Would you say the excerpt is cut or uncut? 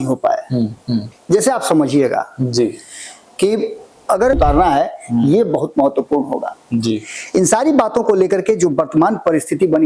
cut